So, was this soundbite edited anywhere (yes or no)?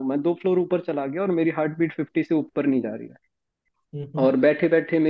no